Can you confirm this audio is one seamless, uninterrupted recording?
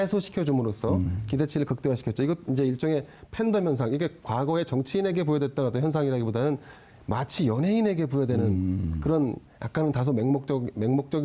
no; 1 cut; at 9.1 s

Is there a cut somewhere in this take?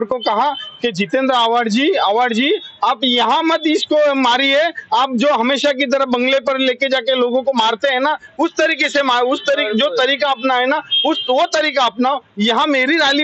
no; 0 cuts

